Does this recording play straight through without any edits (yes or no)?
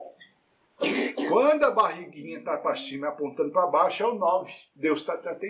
no